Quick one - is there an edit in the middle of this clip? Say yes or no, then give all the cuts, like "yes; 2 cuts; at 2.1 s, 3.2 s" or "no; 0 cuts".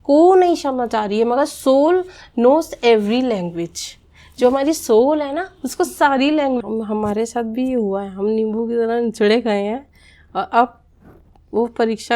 yes; 1 cut; at 6.6 s